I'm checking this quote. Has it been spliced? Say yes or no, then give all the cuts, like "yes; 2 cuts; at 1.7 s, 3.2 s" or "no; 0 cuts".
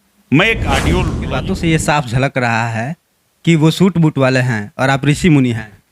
yes; 1 cut; at 1.2 s